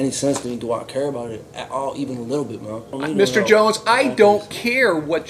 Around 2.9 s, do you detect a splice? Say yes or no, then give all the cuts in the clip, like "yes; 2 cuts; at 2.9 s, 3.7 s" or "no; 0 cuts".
yes; 1 cut; at 2.9 s